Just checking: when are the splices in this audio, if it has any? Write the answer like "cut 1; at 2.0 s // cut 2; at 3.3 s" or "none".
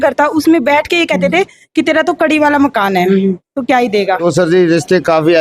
cut 1; at 4.2 s